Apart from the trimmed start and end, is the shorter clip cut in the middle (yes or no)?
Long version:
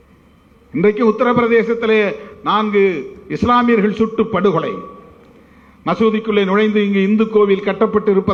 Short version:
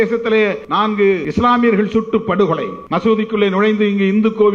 yes